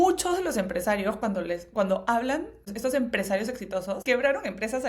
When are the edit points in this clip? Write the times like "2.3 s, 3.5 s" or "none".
2.7 s, 4.0 s